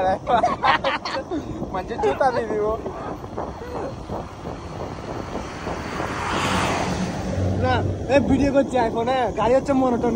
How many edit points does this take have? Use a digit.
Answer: 0